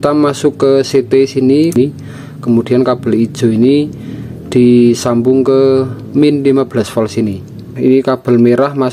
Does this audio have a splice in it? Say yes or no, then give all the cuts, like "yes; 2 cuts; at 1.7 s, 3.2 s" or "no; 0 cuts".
yes; 2 cuts; at 1.8 s, 7.7 s